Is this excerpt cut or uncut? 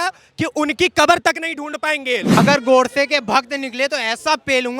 cut